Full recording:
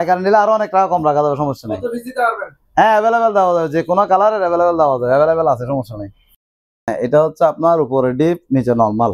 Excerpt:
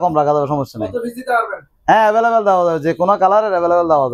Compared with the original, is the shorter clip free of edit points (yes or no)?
yes